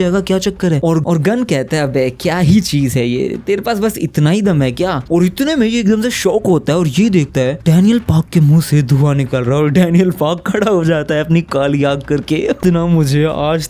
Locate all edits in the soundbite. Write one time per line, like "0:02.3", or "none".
0:12.6